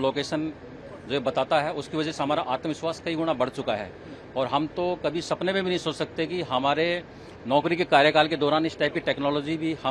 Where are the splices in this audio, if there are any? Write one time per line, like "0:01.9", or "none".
none